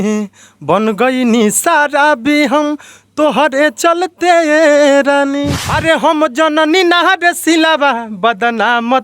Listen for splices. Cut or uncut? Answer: cut